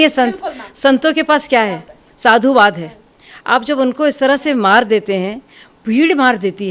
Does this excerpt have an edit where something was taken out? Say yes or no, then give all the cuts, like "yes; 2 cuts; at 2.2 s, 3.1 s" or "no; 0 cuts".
no; 0 cuts